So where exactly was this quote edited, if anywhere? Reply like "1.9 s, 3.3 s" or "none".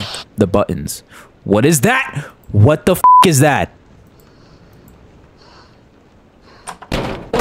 none